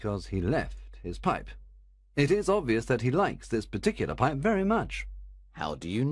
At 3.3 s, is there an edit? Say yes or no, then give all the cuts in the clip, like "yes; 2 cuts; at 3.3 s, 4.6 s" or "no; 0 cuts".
yes; 1 cut; at 3.3 s